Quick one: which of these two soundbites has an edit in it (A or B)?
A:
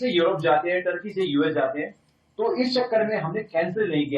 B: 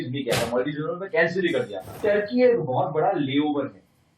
B